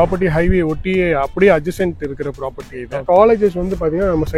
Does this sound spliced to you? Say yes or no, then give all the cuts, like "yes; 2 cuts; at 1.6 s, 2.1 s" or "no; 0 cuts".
yes; 1 cut; at 3.0 s